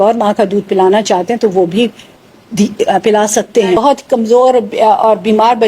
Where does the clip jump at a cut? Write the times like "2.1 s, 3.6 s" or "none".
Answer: 3.8 s